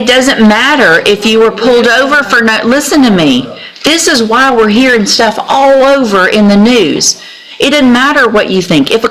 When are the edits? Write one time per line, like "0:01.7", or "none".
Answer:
none